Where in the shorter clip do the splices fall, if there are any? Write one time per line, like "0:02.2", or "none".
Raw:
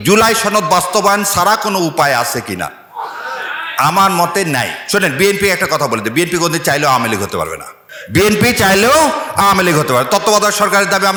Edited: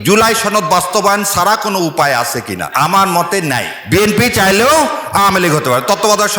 0:02.7
0:03.7